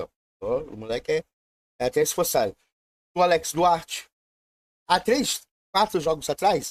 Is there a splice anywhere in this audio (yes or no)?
no